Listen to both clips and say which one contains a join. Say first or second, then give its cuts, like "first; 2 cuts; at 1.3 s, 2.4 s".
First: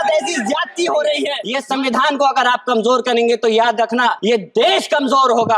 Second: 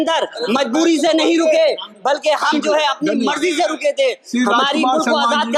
first; 2 cuts; at 1.5 s, 4.2 s